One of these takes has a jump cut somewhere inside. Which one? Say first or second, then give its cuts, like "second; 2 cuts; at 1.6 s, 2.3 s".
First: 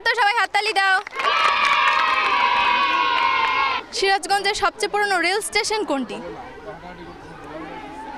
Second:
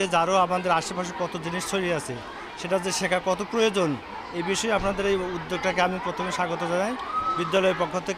first; 3 cuts; at 1.1 s, 2.6 s, 3.7 s